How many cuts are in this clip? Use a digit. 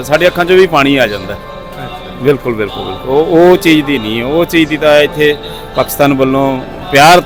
0